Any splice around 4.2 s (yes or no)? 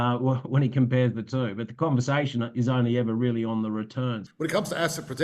yes